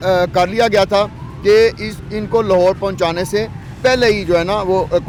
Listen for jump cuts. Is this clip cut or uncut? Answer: uncut